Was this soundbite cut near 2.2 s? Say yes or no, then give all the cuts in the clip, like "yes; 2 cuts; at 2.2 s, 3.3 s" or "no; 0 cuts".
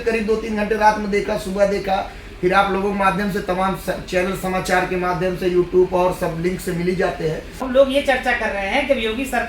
no; 1 cut; at 7.6 s